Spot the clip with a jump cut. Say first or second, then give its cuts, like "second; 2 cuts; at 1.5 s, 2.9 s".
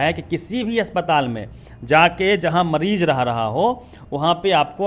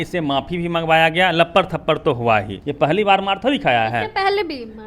second; 1 cut; at 2.6 s